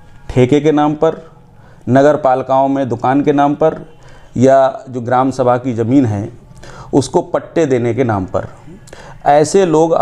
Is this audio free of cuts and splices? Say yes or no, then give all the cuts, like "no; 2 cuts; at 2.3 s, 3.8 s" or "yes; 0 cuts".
yes; 0 cuts